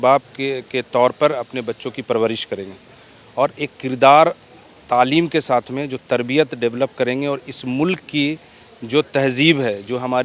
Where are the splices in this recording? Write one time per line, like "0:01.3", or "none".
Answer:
none

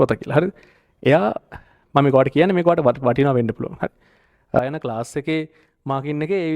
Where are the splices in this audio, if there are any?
0:04.6

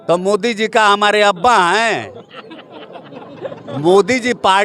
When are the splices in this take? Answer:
none

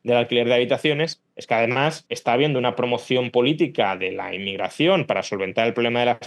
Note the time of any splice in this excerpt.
0:01.3

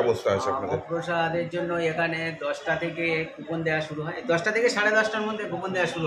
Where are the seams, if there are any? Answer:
none

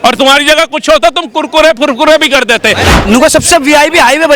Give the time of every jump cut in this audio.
0:02.8

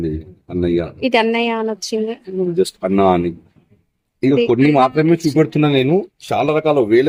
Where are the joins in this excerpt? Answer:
none

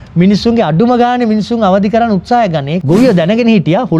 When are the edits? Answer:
0:02.7

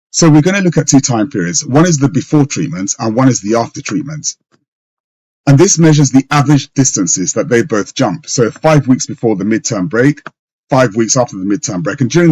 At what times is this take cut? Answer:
none

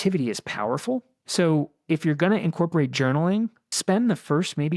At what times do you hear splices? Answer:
0:01.2
0:03.7

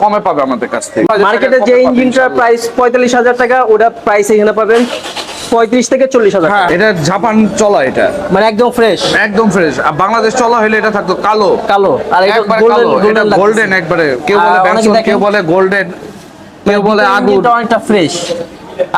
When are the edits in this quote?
0:01.1
0:06.7

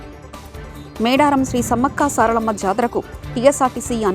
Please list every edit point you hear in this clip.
0:01.0

